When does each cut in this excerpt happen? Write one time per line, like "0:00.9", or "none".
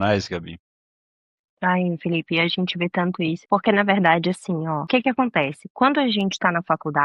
0:03.4
0:04.8

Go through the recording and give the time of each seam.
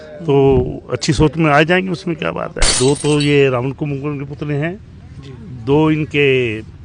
0:02.7

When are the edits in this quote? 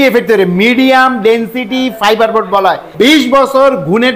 0:02.9

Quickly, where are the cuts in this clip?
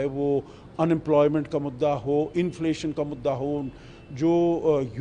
none

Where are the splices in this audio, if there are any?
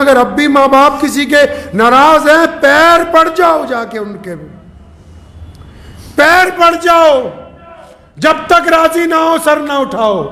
none

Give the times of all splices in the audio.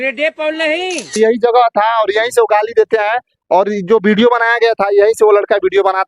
0:01.2

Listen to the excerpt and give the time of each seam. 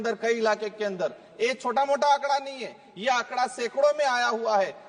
none

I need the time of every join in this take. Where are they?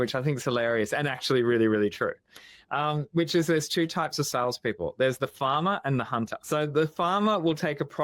0:06.4

